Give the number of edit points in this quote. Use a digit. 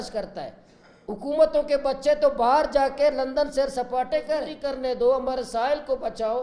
1